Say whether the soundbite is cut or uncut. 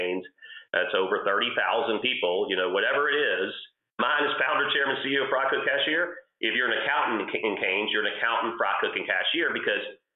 cut